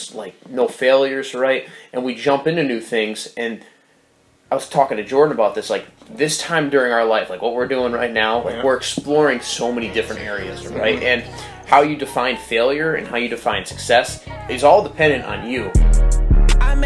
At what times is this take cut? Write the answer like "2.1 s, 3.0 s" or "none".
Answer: 15.7 s

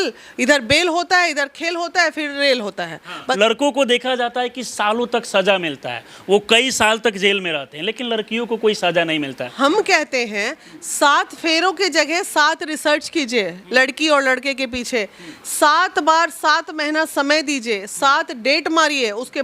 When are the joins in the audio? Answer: 3.4 s, 9.5 s

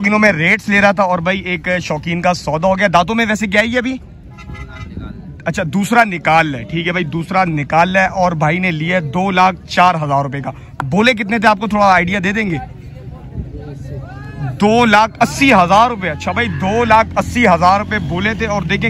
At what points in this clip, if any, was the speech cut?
none

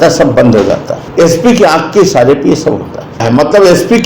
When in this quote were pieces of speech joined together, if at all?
1.0 s, 3.2 s

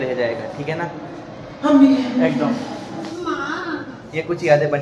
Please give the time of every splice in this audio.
none

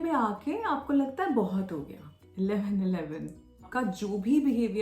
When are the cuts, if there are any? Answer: 3.7 s

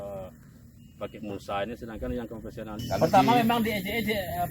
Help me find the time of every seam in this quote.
2.8 s

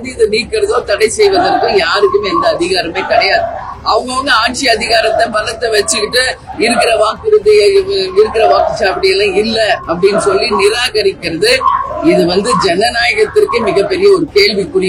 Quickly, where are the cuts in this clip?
none

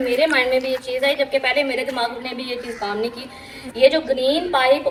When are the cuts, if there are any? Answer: none

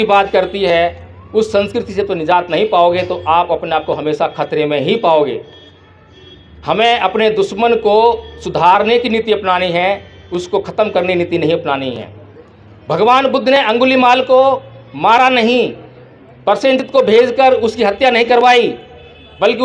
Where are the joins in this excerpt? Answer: none

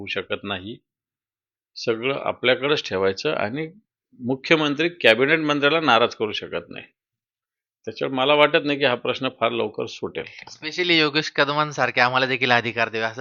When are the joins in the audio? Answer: none

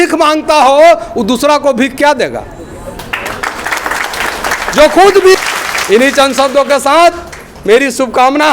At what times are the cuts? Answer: 5.4 s

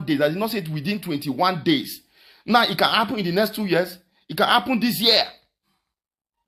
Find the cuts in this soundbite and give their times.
none

